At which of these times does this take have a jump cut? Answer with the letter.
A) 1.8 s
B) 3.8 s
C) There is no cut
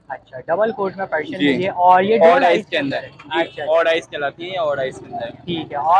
C